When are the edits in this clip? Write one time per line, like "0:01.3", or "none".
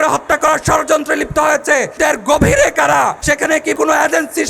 0:02.0
0:03.7